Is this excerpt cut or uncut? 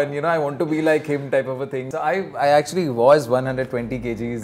cut